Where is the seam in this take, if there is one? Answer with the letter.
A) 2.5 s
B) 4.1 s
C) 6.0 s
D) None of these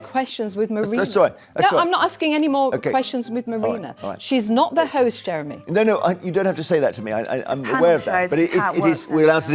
D